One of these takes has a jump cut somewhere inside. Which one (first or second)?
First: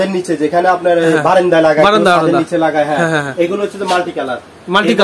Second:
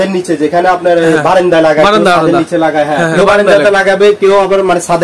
second